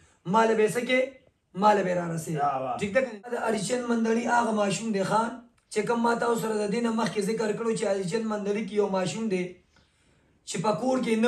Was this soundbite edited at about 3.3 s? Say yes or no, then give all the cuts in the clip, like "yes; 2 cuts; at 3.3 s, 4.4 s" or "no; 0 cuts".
yes; 1 cut; at 3.3 s